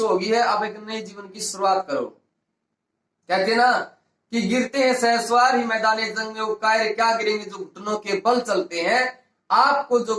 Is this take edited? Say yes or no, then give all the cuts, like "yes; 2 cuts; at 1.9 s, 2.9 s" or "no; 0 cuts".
no; 0 cuts